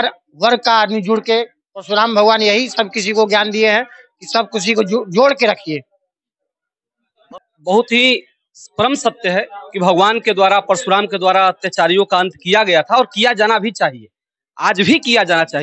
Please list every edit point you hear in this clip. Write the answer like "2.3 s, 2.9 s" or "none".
7.2 s